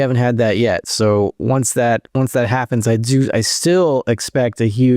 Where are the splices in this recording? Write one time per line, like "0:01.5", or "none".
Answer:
0:02.1